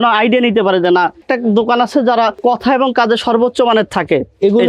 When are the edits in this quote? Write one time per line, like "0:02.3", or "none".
0:01.2
0:02.4